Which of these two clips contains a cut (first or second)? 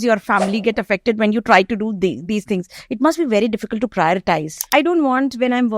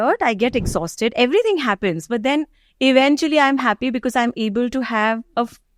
first